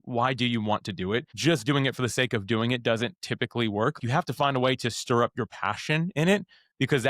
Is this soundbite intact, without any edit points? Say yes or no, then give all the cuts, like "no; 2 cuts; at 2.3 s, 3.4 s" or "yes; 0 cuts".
no; 2 cuts; at 1.3 s, 4.0 s